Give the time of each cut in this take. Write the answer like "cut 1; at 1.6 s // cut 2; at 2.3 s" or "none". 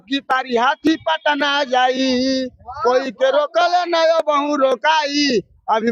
none